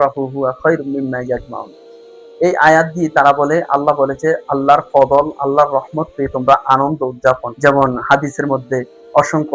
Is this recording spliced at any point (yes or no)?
yes